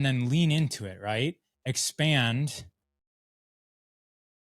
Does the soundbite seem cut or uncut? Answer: uncut